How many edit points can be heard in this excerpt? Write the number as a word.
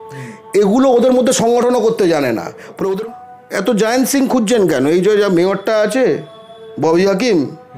one